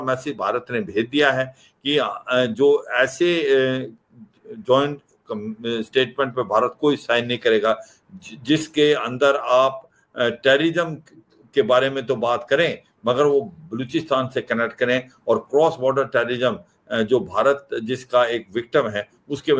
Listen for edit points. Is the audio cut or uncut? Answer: uncut